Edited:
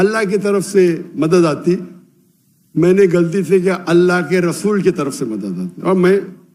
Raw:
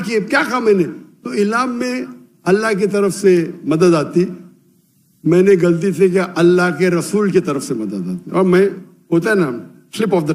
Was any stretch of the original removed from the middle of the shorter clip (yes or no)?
no